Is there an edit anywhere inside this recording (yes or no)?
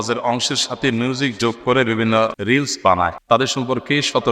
yes